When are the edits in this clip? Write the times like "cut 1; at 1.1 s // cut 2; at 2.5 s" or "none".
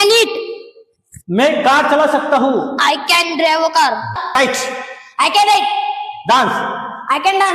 cut 1; at 4.4 s